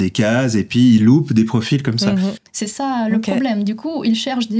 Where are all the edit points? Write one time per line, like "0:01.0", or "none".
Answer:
0:02.4